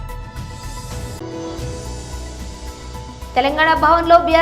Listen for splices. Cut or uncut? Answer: cut